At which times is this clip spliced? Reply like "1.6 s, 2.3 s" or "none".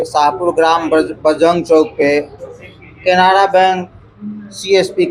none